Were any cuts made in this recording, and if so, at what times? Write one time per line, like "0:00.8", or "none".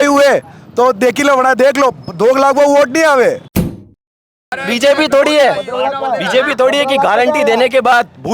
0:04.1